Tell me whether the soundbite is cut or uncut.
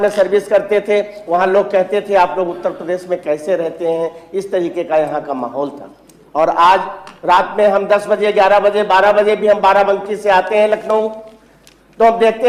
uncut